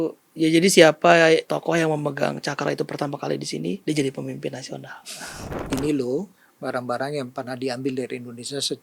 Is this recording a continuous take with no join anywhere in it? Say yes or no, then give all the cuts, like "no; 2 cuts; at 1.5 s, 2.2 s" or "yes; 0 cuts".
no; 3 cuts; at 1.5 s, 3.8 s, 5.5 s